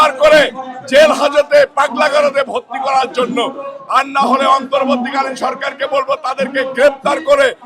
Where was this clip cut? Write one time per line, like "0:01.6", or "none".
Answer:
none